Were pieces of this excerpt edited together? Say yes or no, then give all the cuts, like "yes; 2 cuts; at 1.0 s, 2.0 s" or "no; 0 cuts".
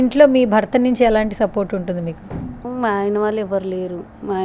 no; 0 cuts